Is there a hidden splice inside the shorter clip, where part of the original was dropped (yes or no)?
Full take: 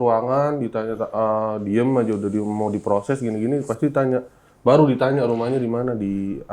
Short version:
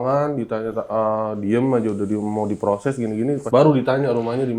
yes